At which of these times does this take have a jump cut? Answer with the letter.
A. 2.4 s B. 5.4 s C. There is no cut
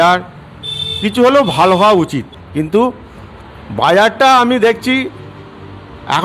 A